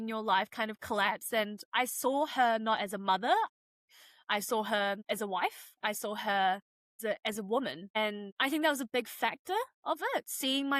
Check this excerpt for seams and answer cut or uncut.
uncut